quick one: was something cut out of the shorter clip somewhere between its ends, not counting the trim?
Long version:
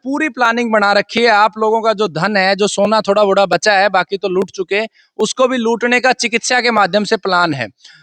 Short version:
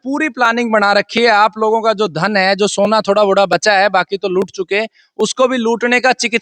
no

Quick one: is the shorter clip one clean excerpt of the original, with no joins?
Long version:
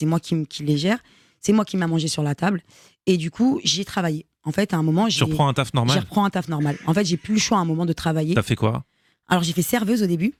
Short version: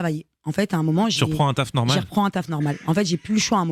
yes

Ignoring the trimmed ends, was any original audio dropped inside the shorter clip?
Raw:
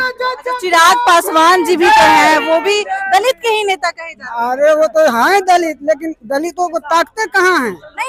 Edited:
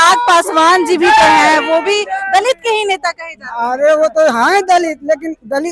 no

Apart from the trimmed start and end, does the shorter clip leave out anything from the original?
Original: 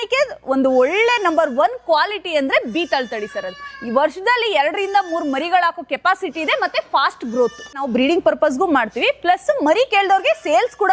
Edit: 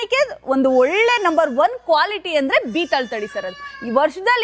no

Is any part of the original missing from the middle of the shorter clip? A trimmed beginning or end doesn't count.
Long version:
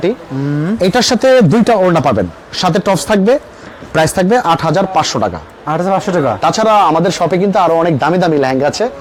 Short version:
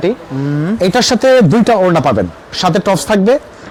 no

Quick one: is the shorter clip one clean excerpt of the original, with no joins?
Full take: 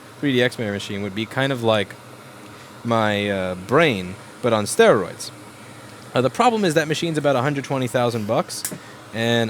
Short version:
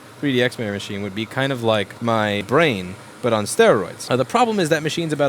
no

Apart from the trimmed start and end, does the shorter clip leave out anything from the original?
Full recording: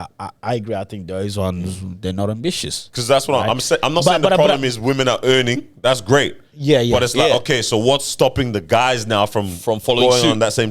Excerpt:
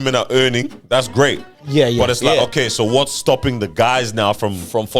no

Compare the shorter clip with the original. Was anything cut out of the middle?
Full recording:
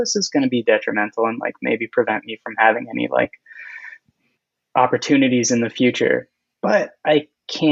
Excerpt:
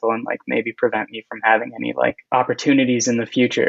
yes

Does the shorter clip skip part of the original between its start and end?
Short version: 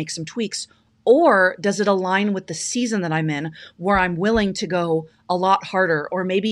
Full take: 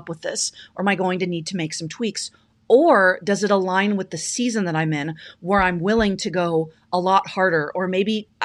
no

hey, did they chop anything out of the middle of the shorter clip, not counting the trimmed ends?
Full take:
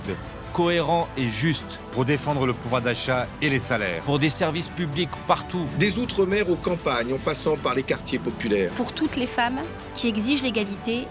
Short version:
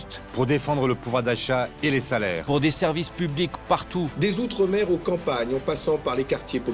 no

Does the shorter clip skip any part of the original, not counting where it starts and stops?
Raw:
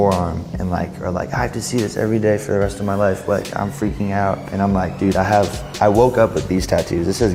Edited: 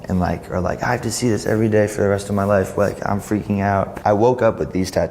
yes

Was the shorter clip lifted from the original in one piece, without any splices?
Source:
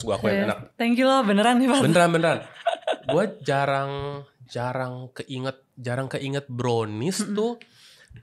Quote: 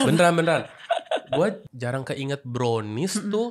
no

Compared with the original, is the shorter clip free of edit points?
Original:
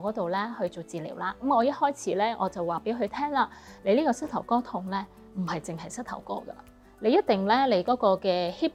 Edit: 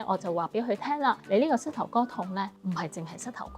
no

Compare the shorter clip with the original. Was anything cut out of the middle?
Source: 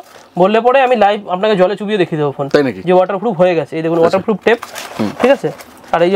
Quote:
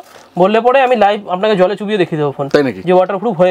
no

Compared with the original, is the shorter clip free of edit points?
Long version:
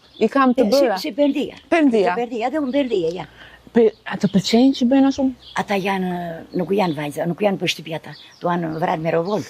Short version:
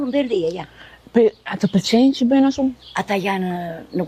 yes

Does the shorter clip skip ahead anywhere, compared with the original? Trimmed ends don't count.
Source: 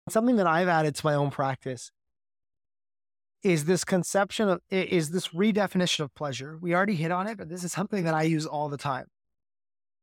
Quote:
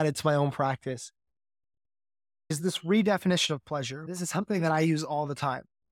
yes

